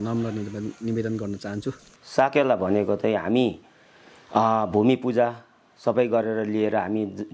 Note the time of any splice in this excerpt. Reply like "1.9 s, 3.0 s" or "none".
2.0 s